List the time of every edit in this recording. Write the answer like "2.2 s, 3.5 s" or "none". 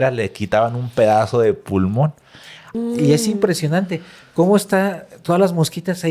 2.7 s

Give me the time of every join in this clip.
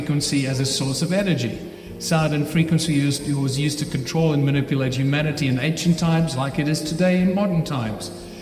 none

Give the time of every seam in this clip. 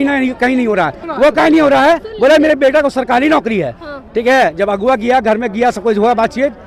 1.1 s

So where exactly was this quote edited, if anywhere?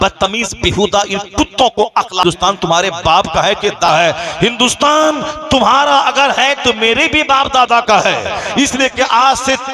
2.2 s, 3.9 s

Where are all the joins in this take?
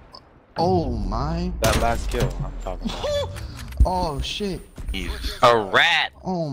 none

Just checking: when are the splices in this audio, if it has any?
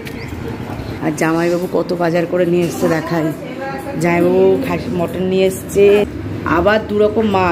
1.0 s, 6.1 s

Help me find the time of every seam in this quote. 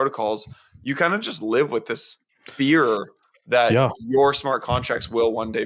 none

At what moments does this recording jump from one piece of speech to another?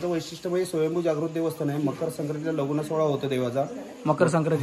none

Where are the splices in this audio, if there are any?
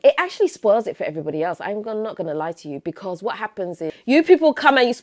4.0 s

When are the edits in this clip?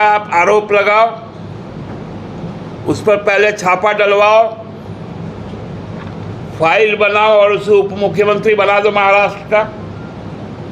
none

